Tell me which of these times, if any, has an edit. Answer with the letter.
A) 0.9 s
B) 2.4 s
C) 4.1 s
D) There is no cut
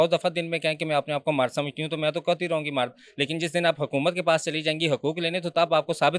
D